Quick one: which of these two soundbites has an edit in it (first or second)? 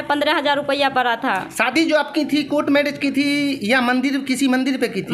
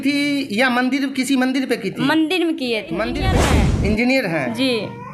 second